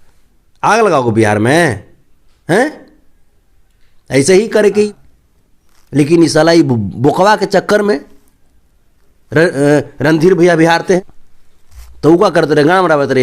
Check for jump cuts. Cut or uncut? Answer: cut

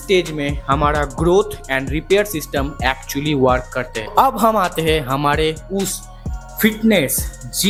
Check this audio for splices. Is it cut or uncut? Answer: uncut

